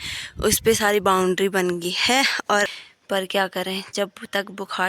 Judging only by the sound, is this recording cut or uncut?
cut